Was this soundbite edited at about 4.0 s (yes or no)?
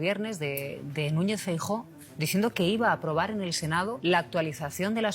yes